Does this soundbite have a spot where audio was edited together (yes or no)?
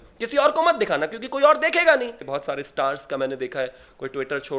yes